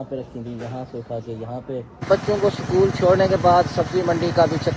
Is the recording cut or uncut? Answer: cut